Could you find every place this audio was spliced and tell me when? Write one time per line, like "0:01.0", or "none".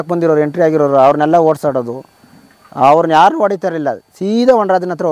none